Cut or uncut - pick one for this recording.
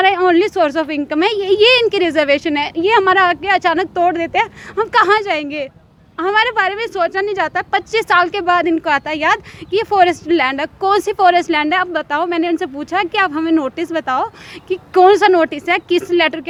uncut